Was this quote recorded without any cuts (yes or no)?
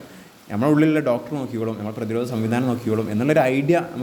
yes